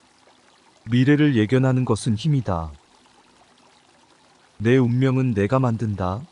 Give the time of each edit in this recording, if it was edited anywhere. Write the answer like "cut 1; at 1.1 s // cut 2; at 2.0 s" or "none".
cut 1; at 0.8 s // cut 2; at 2.8 s // cut 3; at 4.2 s